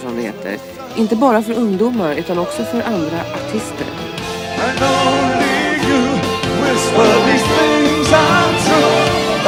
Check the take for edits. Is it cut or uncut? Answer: uncut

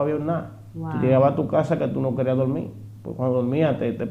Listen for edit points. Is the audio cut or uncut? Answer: uncut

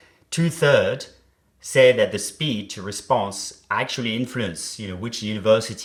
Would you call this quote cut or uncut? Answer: uncut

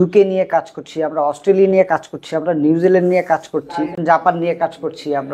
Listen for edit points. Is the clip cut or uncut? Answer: cut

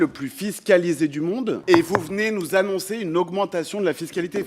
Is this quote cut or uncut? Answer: cut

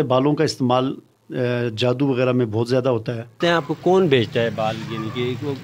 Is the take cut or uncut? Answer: cut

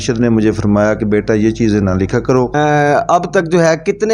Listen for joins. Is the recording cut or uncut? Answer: cut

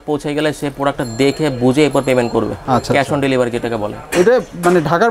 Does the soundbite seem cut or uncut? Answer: uncut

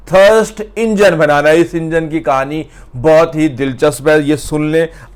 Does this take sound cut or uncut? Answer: uncut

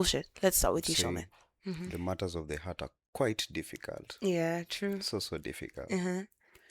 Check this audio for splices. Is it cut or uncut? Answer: cut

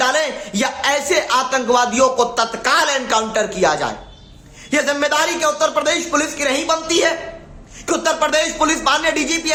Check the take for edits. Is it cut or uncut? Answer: uncut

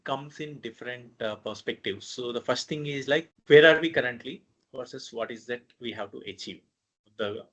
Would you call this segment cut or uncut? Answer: cut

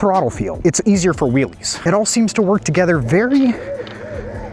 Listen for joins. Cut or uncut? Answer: cut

